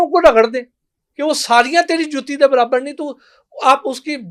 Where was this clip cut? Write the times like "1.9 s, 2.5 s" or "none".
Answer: none